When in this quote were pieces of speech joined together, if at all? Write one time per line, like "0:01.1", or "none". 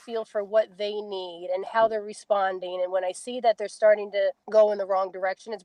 0:04.4